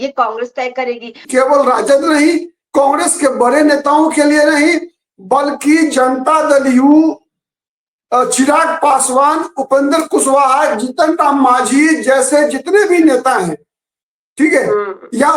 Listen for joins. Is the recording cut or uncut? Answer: cut